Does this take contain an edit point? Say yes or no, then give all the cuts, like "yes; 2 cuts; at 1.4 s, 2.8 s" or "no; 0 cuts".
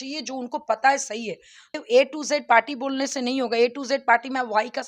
yes; 1 cut; at 1.7 s